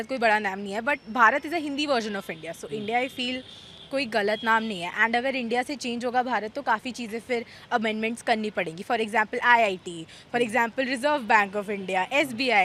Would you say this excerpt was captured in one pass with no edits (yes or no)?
yes